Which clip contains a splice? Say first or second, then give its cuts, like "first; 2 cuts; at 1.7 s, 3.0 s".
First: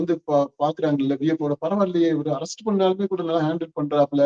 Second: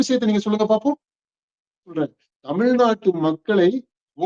second; 1 cut; at 1.9 s